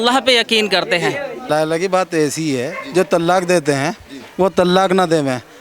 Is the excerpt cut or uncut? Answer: cut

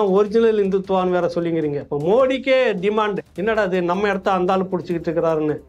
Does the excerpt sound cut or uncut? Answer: cut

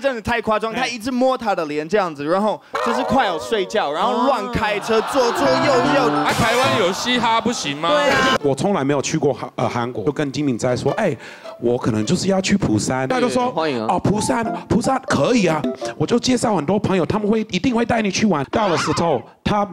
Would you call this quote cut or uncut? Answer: cut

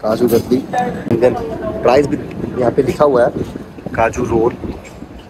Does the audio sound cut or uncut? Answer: cut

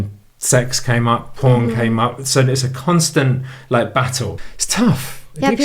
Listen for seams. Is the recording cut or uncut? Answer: cut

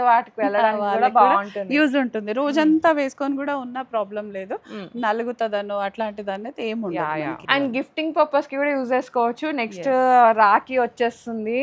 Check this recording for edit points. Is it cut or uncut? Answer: cut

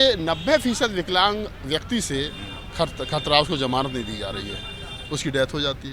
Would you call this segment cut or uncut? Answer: uncut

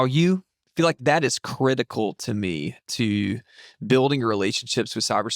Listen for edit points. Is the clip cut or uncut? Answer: cut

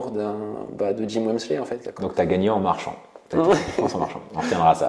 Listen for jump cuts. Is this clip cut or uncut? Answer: cut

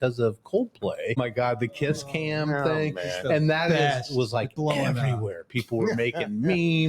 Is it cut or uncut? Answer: cut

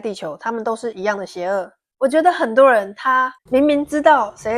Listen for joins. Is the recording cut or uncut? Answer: cut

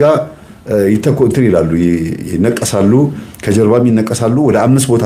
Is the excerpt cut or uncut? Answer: uncut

